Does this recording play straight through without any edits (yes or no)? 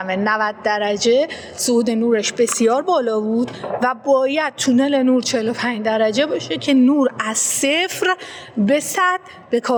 yes